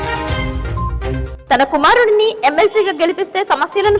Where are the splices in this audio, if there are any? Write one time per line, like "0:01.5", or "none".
0:00.9